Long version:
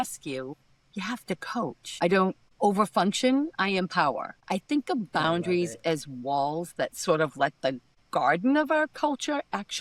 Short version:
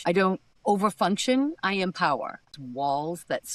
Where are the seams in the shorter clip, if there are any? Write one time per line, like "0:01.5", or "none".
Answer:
0:02.5